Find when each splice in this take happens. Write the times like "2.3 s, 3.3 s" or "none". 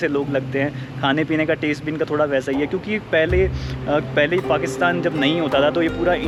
none